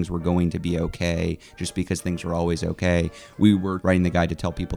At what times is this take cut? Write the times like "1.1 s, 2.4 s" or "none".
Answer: 3.8 s

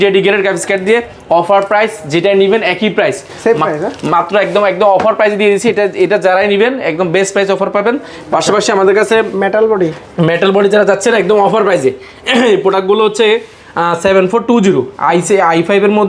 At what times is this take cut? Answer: none

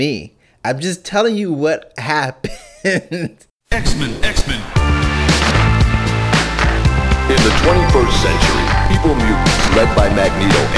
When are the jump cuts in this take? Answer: 3.4 s

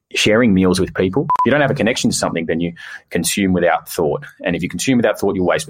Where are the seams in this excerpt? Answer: 1.3 s

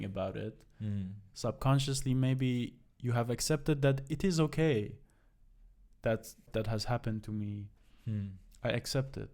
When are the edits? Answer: 6.5 s

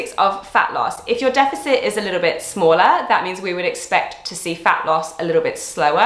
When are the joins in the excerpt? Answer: none

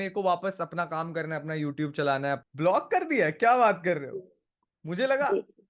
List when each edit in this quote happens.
2.4 s

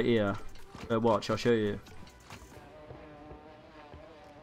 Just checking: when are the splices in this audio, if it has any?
2.5 s

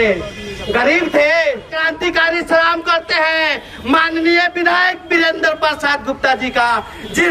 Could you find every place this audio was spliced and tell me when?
1.8 s

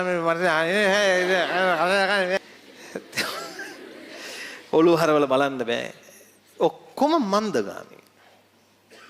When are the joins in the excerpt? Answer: 2.4 s

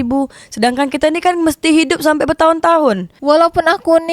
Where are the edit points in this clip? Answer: 3.1 s

